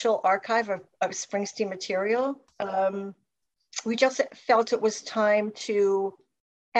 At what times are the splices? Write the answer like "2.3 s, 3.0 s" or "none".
2.5 s